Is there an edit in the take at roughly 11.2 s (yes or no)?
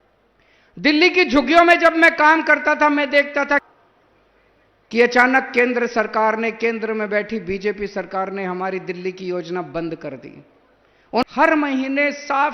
yes